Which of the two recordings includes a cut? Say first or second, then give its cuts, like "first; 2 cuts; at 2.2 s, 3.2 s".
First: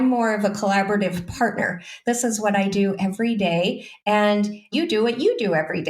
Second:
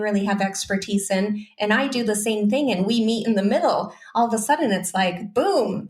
first; 1 cut; at 4.7 s